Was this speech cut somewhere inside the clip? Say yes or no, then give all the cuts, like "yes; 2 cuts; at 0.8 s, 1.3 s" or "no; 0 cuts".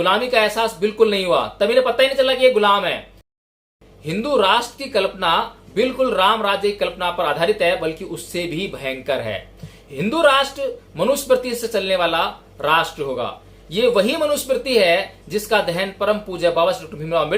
yes; 1 cut; at 3.3 s